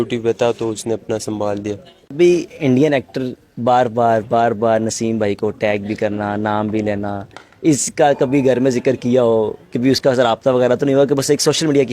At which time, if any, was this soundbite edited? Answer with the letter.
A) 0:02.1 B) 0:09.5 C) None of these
A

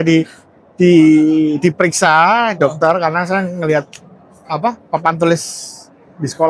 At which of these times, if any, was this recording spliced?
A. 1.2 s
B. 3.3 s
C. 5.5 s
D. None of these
D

